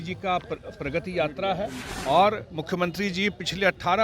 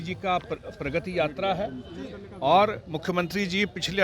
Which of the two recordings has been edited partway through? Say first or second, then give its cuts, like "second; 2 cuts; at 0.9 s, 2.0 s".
first; 1 cut; at 1.9 s